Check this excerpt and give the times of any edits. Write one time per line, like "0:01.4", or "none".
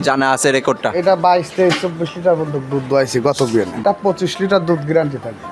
0:03.8